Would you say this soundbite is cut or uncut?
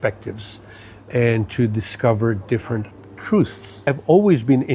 cut